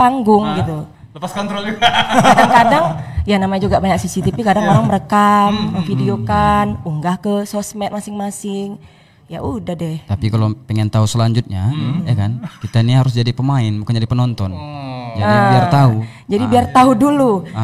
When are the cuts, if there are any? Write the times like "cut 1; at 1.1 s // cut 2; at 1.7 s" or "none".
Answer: none

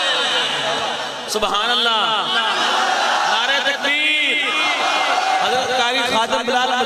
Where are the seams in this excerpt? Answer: none

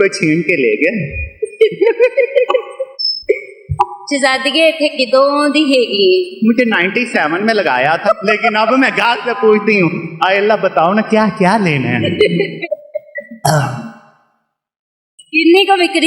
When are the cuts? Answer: cut 1; at 8.0 s // cut 2; at 12.6 s

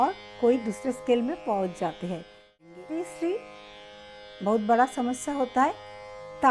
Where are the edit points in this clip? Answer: cut 1; at 2.6 s

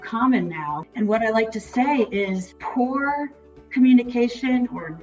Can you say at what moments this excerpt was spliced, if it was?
cut 1; at 0.9 s // cut 2; at 2.5 s

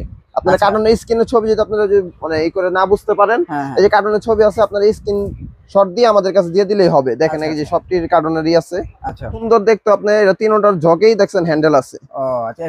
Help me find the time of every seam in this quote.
cut 1; at 9.4 s

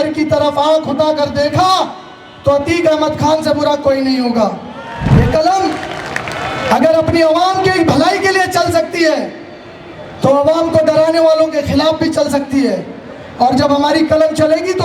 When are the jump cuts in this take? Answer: cut 1; at 5.0 s

